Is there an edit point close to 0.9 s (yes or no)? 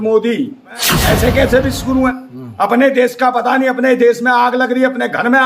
yes